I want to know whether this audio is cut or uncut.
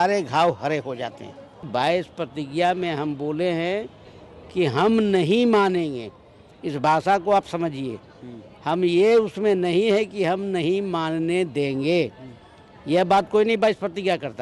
cut